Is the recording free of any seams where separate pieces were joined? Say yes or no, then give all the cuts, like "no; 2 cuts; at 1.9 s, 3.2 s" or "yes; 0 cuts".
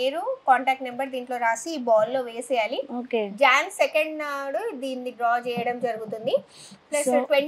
yes; 0 cuts